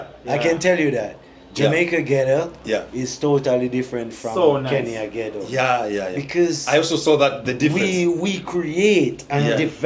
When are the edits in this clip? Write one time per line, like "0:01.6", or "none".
none